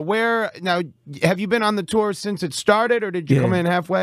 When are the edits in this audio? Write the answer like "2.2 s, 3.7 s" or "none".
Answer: none